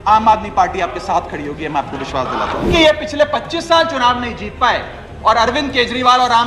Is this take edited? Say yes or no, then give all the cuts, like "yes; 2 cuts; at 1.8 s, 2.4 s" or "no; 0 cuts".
yes; 1 cut; at 2.7 s